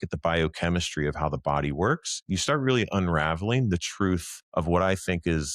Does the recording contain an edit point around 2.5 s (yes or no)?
no